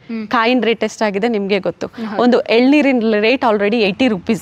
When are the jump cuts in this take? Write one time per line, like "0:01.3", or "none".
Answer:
none